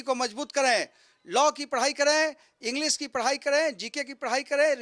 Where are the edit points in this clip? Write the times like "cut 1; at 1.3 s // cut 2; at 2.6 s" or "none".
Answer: none

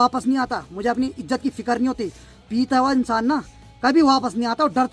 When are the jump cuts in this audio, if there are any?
none

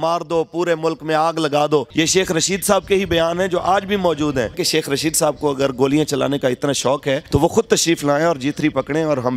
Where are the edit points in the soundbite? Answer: cut 1; at 1.9 s // cut 2; at 4.6 s // cut 3; at 7.2 s

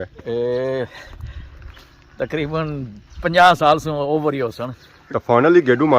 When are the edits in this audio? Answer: cut 1; at 4.9 s

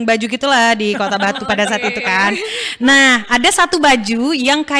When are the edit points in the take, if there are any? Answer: none

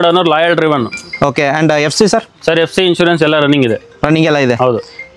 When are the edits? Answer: none

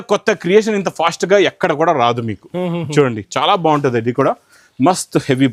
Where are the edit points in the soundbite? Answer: none

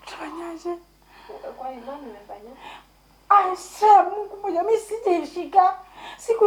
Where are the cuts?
none

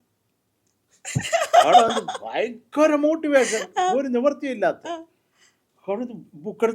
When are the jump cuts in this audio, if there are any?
none

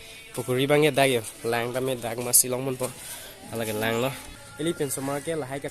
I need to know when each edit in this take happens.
cut 1; at 4.4 s

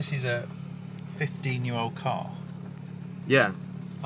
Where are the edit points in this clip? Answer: none

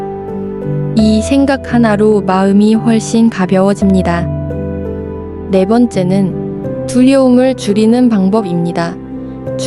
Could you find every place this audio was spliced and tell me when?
none

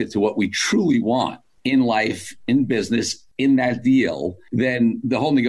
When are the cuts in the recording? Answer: none

